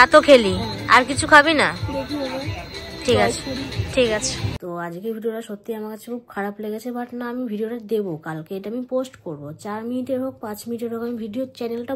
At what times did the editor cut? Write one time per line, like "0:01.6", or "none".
0:04.4